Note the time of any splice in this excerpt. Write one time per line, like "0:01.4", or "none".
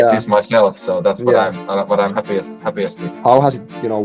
0:03.0